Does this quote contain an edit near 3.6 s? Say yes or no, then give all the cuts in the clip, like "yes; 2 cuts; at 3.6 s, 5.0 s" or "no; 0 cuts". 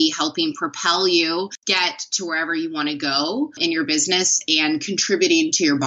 yes; 2 cuts; at 1.6 s, 3.6 s